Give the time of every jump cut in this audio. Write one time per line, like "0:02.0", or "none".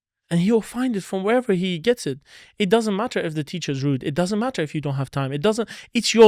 none